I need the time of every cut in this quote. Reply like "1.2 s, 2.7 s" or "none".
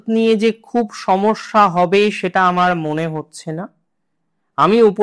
none

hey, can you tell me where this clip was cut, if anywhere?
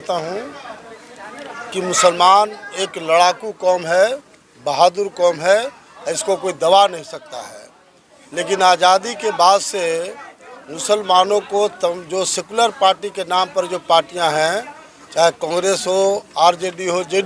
none

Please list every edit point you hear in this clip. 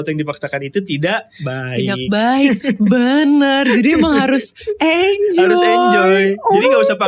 none

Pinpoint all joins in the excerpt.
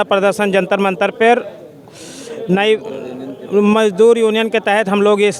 none

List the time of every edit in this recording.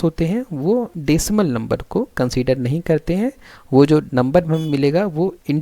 0.9 s

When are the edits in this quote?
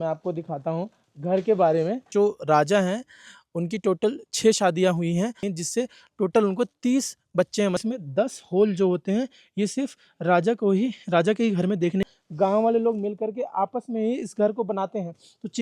2.1 s, 5.5 s, 7.8 s, 12.1 s

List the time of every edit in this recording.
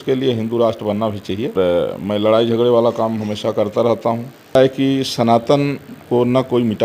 1.5 s, 4.6 s

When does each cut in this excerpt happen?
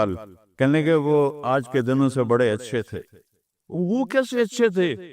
3.7 s

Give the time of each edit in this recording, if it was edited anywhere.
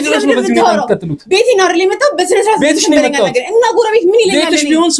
none

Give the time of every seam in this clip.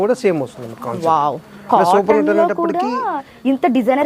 none

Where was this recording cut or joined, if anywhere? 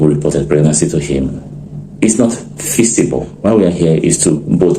3.3 s

